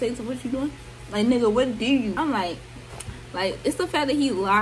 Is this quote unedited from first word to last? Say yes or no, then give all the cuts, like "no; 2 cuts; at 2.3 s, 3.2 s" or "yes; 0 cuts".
no; 1 cut; at 2.1 s